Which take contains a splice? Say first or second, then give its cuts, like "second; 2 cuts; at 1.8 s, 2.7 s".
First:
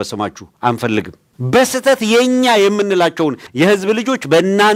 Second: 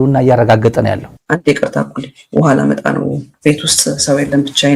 second; 1 cut; at 1.1 s